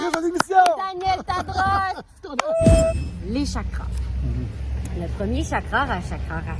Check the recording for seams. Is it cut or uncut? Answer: cut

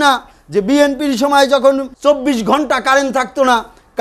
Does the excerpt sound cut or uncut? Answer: cut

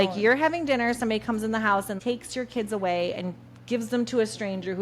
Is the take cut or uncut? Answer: cut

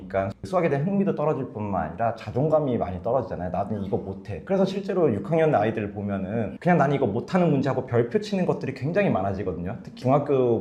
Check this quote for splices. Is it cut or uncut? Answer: uncut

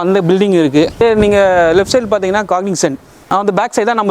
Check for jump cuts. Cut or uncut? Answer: cut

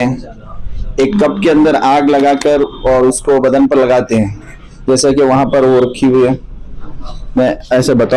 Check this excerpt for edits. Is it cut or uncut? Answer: uncut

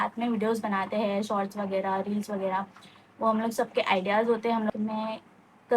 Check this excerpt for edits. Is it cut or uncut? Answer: cut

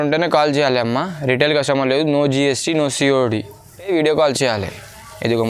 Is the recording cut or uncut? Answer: uncut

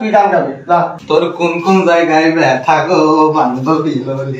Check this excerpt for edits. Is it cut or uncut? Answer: cut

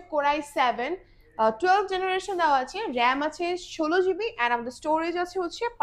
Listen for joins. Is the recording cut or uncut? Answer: uncut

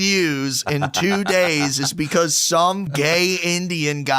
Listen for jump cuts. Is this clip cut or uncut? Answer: cut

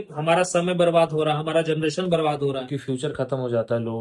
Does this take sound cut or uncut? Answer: cut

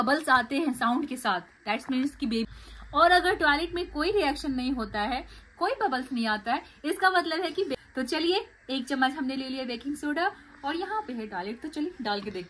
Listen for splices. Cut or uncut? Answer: cut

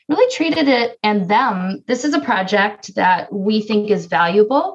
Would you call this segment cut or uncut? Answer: cut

